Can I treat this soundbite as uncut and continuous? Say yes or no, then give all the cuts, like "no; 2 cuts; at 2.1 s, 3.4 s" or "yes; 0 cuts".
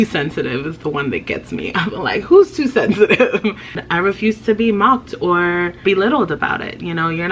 no; 2 cuts; at 3.8 s, 5.8 s